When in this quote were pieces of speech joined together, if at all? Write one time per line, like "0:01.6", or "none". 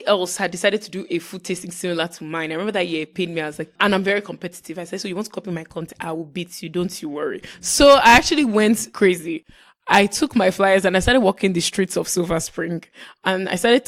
0:03.7
0:08.9